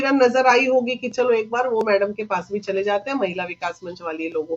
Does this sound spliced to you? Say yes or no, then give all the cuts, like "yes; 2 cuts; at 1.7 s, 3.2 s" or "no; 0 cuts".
no; 0 cuts